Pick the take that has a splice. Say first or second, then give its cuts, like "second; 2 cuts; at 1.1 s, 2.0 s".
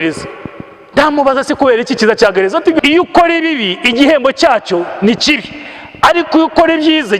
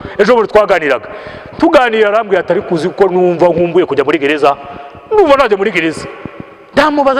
first; 1 cut; at 2.8 s